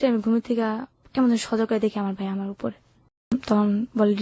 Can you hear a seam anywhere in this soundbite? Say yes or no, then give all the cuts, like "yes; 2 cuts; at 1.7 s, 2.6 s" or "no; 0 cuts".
yes; 1 cut; at 3.3 s